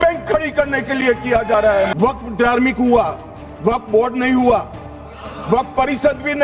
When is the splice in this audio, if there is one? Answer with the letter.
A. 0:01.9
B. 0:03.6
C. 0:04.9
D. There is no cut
A